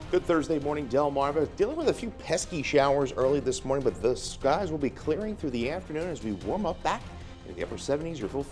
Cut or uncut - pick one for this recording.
uncut